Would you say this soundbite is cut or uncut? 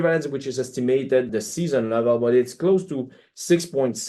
uncut